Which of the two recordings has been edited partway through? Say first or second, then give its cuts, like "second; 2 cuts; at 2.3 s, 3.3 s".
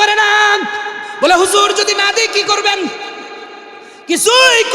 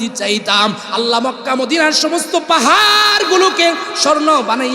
first; 1 cut; at 1.0 s